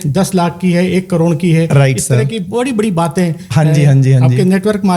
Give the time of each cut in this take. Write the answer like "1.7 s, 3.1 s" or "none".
none